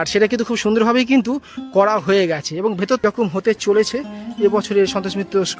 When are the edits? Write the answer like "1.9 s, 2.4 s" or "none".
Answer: 3.0 s